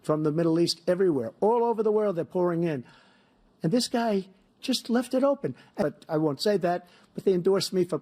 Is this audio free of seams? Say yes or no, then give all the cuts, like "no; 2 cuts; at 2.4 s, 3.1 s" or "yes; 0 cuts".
no; 1 cut; at 5.8 s